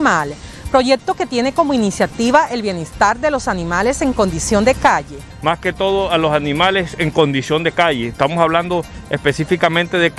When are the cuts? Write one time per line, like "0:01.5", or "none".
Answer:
0:05.2

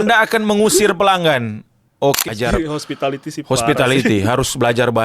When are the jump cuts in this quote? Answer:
0:02.3

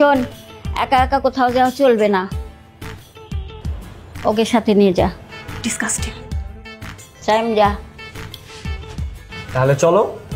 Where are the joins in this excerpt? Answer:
none

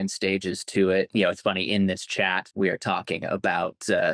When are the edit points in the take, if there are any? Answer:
0:01.1
0:02.5

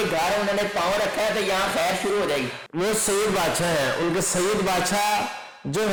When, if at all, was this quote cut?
none

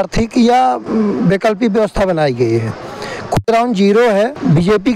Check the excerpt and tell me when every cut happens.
none

